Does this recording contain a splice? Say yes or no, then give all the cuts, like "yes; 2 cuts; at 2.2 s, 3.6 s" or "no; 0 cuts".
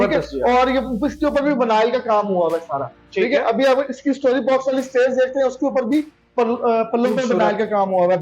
no; 0 cuts